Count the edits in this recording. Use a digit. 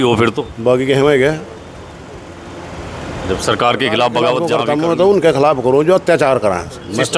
1